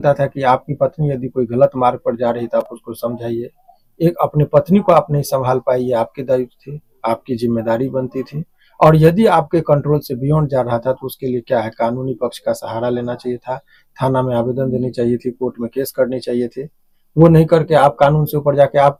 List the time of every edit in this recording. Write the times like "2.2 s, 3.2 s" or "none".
none